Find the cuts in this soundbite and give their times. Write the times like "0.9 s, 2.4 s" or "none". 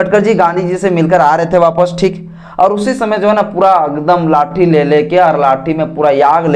none